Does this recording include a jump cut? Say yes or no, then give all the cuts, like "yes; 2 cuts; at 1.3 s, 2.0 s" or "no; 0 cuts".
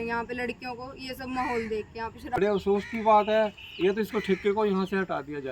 yes; 1 cut; at 2.4 s